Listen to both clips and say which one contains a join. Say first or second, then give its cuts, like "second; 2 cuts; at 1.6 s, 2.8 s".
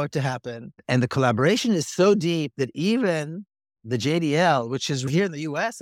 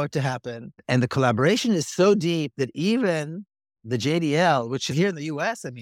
second; 1 cut; at 4.9 s